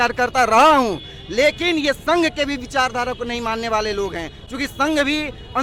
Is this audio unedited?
yes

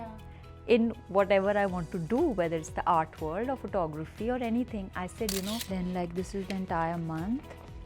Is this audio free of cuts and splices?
no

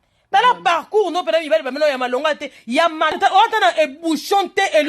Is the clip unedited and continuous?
no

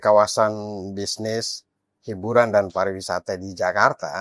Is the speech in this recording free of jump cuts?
yes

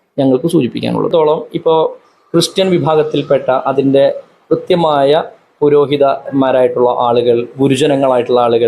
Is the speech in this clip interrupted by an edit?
yes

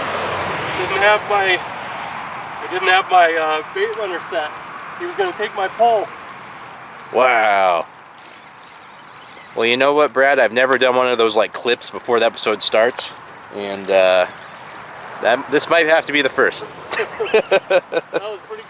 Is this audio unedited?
yes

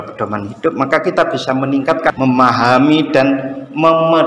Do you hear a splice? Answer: yes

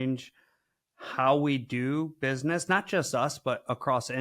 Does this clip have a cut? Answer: no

